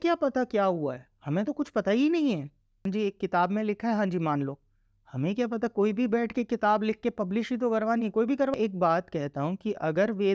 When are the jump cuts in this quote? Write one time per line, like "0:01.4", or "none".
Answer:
0:02.9
0:08.5